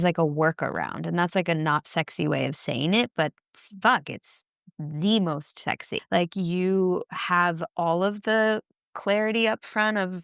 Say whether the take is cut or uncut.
cut